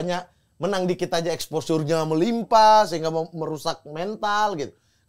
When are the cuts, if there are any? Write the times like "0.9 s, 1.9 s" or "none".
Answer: none